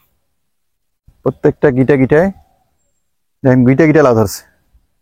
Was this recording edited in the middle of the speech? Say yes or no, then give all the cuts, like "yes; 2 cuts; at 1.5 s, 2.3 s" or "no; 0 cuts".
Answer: no; 0 cuts